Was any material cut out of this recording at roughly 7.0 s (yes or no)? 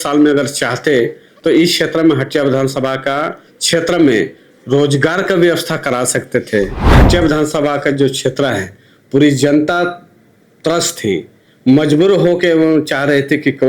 yes